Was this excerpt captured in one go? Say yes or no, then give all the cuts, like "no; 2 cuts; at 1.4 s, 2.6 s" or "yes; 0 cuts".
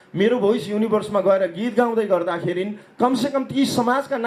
yes; 0 cuts